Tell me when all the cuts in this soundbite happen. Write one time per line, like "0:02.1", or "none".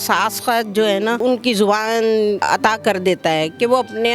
0:01.2
0:02.4